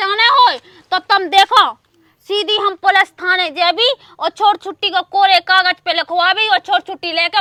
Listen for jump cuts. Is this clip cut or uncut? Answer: uncut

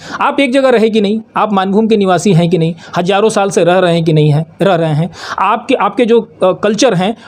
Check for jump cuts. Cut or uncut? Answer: uncut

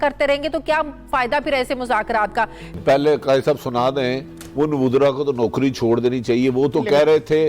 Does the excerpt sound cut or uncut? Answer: cut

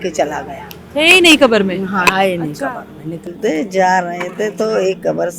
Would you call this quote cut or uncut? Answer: cut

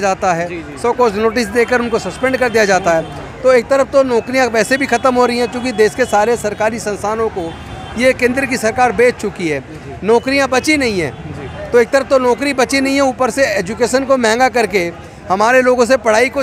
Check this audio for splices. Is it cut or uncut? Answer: uncut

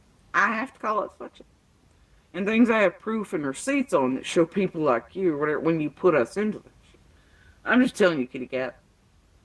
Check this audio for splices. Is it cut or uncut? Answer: uncut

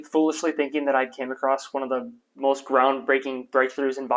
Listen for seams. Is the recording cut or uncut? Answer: uncut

